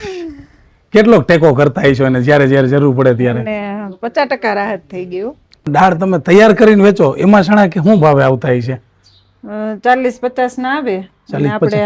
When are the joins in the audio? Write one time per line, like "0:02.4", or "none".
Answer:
0:05.7